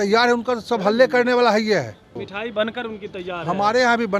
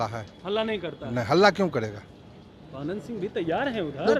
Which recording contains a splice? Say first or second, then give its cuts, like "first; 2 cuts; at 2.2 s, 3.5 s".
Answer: first; 1 cut; at 2.2 s